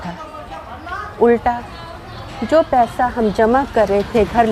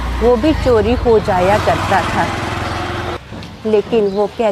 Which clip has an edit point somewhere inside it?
second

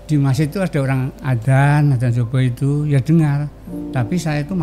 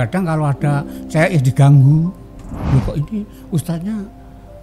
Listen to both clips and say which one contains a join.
second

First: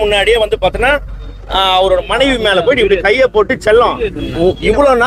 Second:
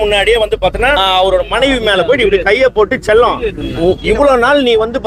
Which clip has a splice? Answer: second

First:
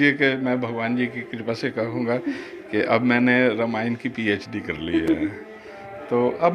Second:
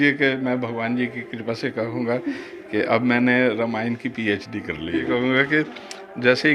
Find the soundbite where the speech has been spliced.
second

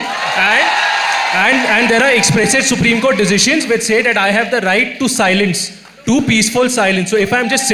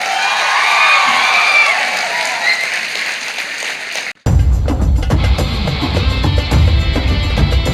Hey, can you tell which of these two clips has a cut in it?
second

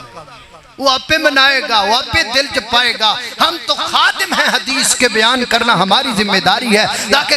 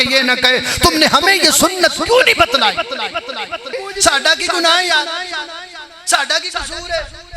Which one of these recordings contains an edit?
second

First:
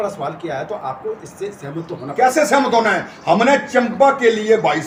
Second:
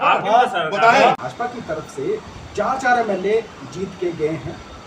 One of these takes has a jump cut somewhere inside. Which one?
second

